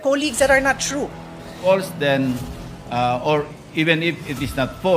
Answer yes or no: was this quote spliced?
yes